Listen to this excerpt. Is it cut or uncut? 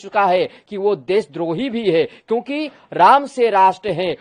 uncut